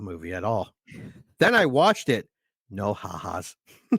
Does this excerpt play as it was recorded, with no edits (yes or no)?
yes